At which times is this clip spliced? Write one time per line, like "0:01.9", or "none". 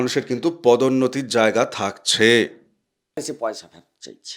0:03.2